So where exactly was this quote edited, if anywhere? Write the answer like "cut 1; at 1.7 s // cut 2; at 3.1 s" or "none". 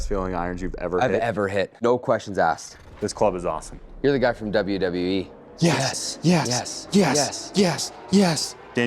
cut 1; at 1.8 s // cut 2; at 2.7 s // cut 3; at 5.4 s